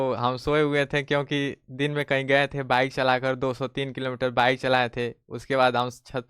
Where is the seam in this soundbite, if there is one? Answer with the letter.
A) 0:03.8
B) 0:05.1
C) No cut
C